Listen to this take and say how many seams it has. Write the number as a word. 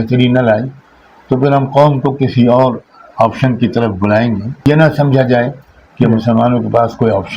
one